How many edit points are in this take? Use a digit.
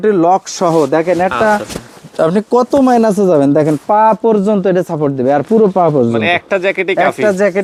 0